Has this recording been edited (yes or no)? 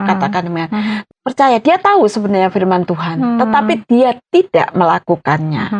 yes